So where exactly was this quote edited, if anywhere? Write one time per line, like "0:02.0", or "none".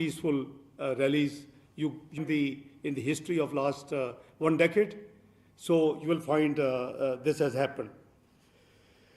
0:02.2